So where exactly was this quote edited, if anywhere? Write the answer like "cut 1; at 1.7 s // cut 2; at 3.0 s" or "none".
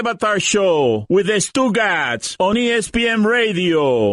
none